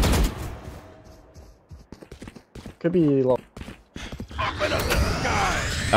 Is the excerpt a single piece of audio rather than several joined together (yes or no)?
yes